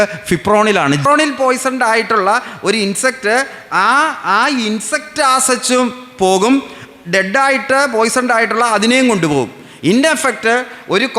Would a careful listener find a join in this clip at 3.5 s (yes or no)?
no